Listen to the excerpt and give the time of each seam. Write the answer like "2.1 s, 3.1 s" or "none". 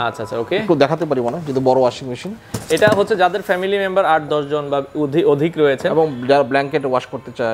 none